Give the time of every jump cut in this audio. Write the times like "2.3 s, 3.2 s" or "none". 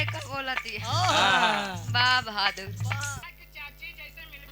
3.2 s